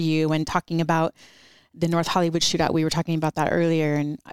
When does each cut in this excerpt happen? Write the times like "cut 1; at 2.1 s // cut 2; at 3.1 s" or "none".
none